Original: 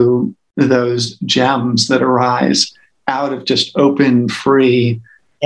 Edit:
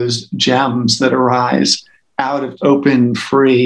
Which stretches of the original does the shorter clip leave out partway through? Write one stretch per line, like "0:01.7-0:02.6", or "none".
0:03.4-0:03.6

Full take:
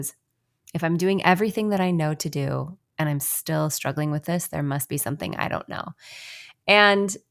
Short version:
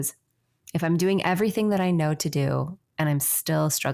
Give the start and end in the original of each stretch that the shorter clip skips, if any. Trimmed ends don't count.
none

